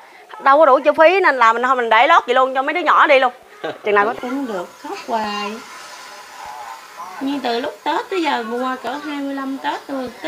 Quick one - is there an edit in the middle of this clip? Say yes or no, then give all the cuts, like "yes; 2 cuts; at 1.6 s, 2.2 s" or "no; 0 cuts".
yes; 1 cut; at 4.1 s